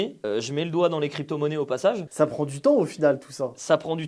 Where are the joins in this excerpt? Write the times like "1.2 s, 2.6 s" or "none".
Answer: 2.1 s

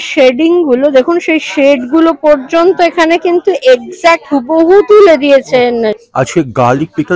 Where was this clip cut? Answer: 6.0 s

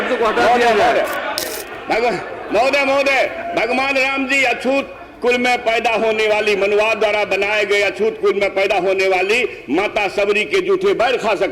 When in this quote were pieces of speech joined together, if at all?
1.4 s

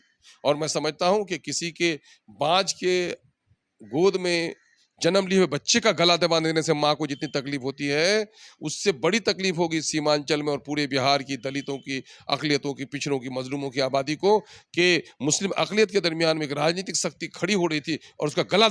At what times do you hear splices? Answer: none

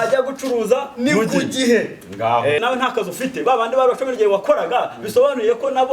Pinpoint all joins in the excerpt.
2.6 s

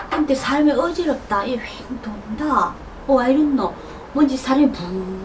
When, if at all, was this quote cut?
none

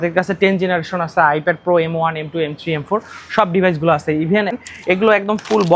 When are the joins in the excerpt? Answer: 4.6 s

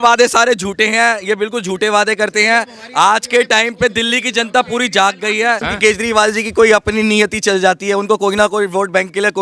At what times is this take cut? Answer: 5.7 s

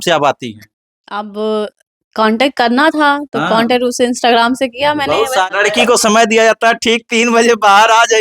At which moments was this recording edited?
5.5 s

